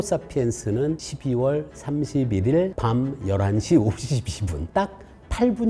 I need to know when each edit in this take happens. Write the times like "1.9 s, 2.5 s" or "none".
1.1 s, 2.8 s, 4.5 s